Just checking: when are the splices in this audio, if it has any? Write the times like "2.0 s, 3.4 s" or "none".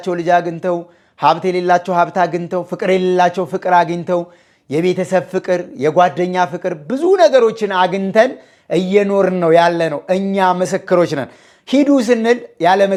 none

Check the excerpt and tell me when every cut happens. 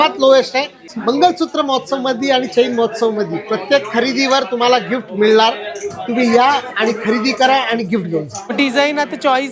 0.9 s, 8.4 s

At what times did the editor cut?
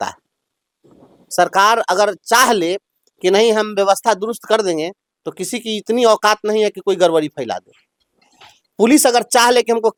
none

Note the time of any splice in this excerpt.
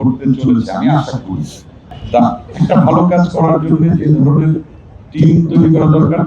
1.9 s

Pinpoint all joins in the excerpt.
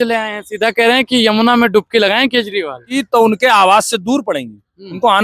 3.0 s

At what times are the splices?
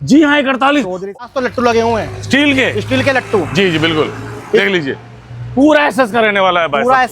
1.2 s

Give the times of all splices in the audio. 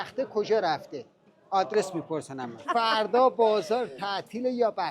2.6 s

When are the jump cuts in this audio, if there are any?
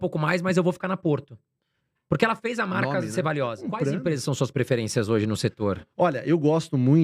3.6 s

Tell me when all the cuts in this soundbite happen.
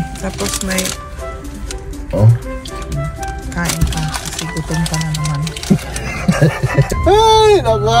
6.9 s

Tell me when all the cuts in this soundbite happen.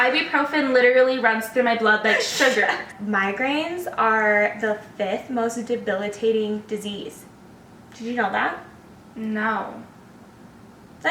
2.9 s

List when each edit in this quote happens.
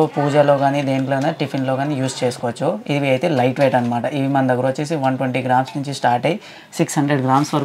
none

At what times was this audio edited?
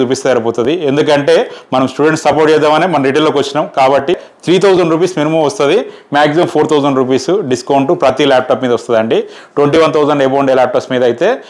4.2 s

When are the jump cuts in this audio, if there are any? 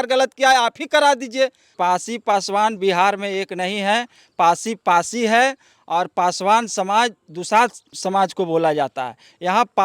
1.7 s, 7.9 s

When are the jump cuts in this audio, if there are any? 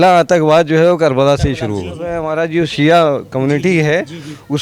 2.2 s

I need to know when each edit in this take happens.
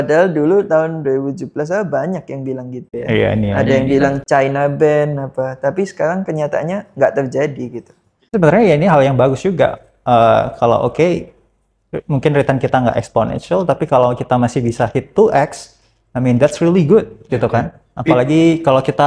none

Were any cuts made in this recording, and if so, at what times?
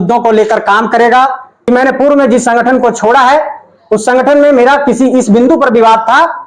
1.5 s

